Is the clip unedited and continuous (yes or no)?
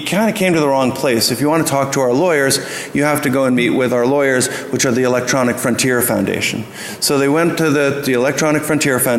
no